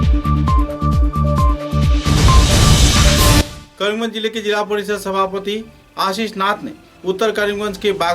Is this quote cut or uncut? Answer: cut